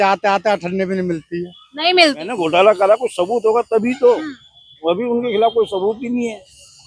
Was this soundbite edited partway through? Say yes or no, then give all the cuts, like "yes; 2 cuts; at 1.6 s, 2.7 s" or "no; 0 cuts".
yes; 1 cut; at 2.4 s